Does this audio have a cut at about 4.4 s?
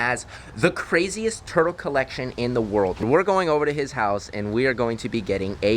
no; 1 cut; at 3.0 s

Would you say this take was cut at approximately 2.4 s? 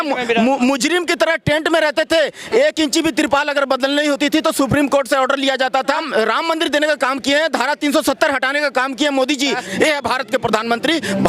no; 2 cuts; at 6.0 s, 9.6 s

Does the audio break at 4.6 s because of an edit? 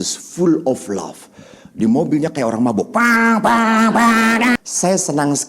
yes; 1 cut; at 4.6 s

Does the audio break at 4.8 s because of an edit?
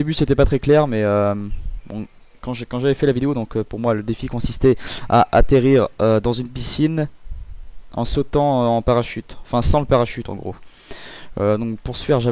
no; 1 cut; at 10.2 s

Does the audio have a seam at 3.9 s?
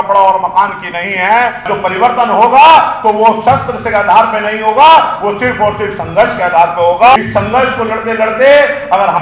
no; 2 cuts; at 1.7 s, 7.2 s

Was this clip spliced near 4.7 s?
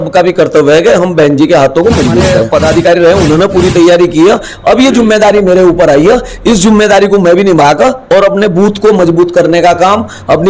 no; 1 cut; at 2.4 s

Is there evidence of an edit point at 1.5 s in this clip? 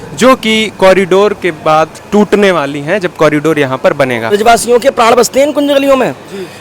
no; 1 cut; at 4.3 s

